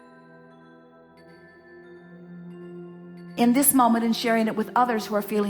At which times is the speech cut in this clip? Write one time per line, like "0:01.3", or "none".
0:03.4